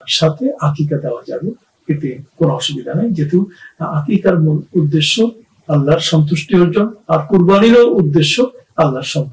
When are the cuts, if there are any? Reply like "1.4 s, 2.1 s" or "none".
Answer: none